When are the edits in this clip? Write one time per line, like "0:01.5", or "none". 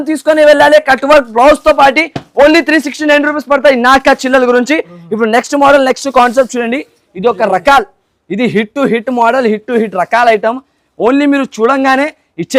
none